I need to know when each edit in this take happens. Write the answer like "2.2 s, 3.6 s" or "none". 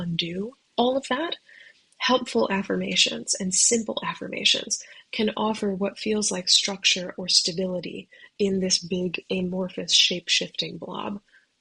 none